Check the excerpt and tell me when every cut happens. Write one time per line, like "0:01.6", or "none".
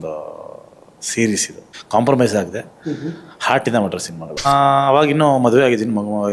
0:04.4